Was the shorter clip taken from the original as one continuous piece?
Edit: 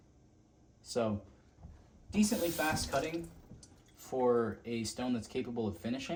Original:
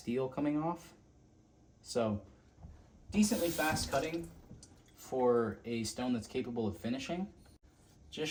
yes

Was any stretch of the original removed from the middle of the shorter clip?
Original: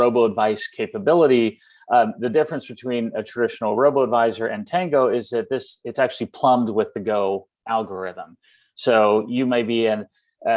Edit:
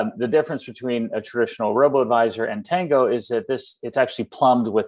no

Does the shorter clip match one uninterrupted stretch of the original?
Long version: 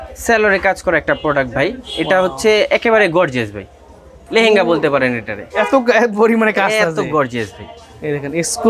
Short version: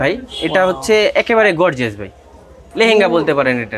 yes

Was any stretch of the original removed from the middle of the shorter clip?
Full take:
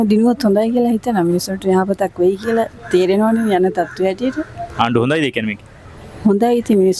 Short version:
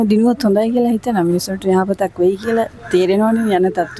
no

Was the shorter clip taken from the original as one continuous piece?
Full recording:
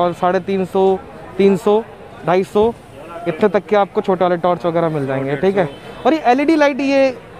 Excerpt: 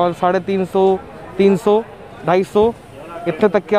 yes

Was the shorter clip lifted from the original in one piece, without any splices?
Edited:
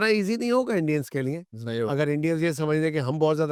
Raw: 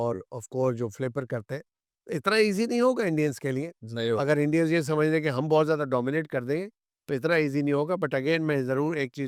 yes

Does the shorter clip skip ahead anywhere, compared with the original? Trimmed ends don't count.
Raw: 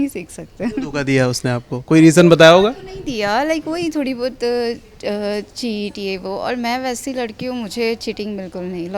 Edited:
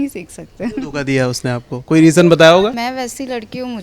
yes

